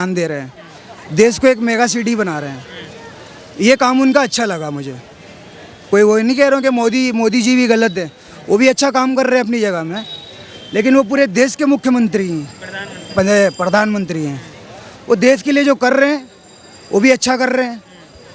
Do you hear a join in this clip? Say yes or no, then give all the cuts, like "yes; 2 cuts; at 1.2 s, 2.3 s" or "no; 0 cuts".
no; 0 cuts